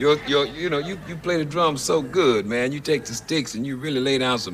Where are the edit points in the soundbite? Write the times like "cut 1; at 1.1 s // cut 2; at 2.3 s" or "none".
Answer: none